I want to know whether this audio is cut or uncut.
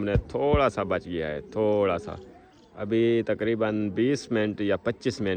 uncut